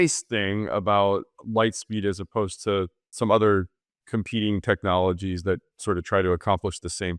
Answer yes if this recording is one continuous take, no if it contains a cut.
no